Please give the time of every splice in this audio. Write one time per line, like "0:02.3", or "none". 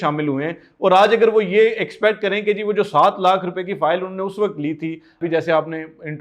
0:05.2